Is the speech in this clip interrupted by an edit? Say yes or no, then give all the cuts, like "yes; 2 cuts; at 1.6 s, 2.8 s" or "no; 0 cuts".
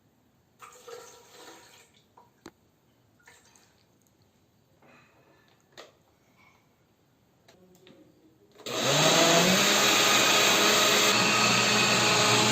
yes; 1 cut; at 11.1 s